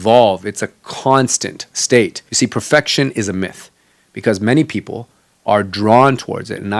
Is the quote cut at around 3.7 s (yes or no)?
no